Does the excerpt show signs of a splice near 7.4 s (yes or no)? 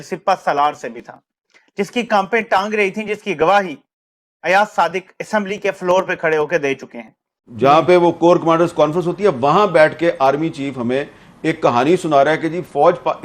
yes